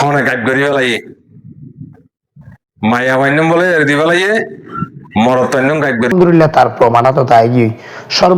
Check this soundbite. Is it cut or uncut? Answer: cut